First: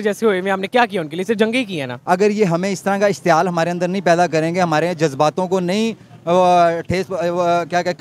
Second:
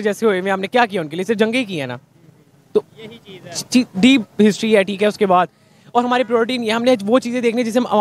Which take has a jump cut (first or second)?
first